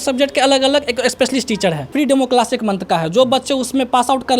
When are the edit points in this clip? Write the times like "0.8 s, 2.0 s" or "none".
1.9 s